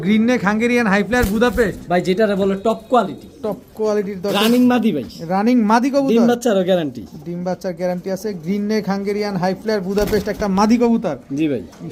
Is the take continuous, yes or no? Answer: yes